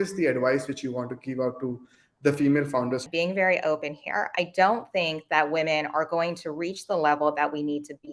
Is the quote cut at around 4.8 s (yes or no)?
no